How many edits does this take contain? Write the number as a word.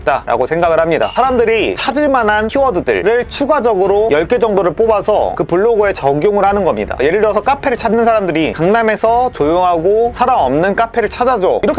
one